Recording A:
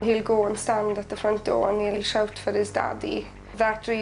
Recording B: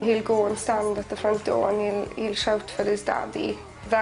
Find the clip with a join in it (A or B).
A